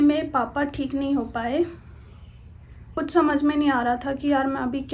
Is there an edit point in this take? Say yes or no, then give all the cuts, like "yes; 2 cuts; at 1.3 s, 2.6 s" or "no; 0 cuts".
yes; 1 cut; at 2.9 s